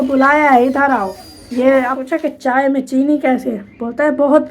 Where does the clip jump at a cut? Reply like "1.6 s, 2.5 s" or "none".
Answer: 2.0 s